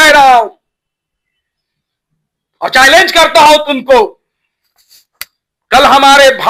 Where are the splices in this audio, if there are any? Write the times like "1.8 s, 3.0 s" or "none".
none